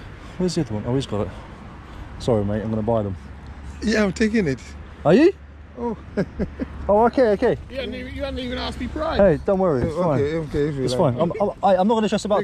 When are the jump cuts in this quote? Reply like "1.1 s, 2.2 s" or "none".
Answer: none